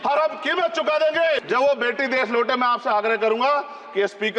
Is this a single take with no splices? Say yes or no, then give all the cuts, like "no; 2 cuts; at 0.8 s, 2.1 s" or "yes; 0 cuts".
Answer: no; 1 cut; at 1.4 s